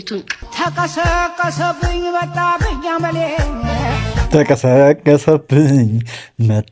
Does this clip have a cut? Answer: no; 0 cuts

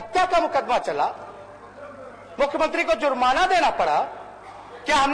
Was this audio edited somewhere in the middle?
no; 0 cuts

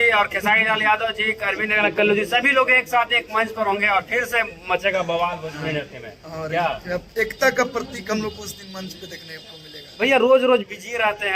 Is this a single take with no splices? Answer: yes; 0 cuts

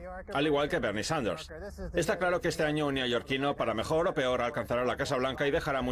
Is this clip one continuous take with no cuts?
no; 1 cut; at 2.4 s

